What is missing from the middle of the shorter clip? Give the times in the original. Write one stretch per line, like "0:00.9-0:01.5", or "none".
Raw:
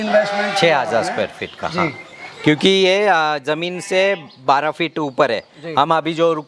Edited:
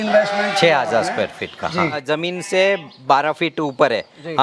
0:02.0-0:03.4